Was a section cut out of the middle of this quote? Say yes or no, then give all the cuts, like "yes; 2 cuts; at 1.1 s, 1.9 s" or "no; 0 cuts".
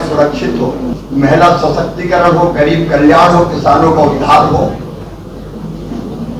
yes; 1 cut; at 1.0 s